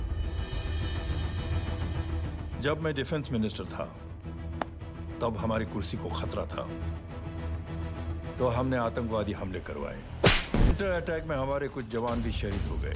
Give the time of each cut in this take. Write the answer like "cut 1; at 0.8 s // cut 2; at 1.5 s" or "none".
cut 1; at 10.7 s